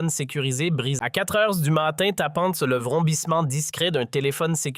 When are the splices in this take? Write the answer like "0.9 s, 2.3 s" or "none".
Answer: 1.0 s